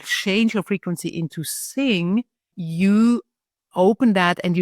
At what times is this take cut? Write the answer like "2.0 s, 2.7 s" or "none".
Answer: 2.6 s